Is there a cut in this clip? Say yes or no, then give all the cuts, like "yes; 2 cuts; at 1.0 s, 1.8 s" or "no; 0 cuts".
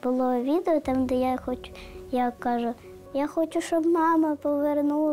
no; 0 cuts